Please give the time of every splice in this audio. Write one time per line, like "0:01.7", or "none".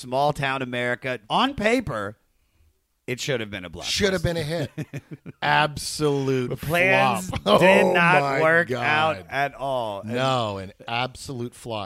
0:01.2

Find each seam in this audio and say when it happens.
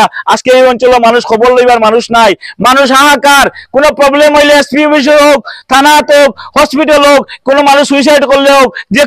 none

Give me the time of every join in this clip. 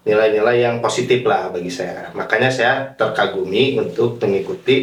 none

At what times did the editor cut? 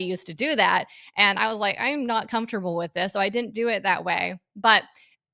none

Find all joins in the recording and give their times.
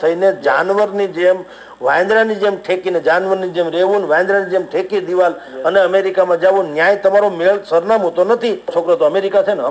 0:08.7

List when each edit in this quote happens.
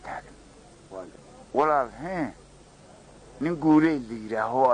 0:01.2

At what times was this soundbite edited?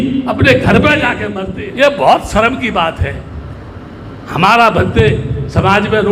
0:01.3

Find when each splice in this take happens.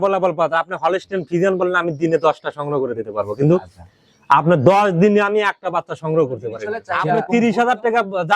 0:06.8

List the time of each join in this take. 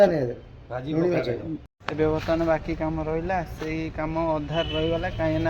0:01.6

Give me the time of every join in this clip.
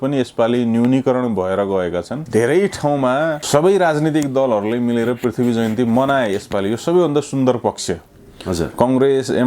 0:02.2
0:03.4

